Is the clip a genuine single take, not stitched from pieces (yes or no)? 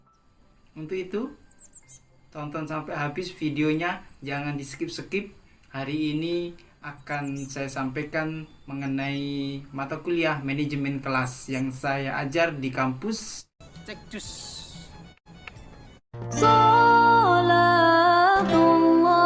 yes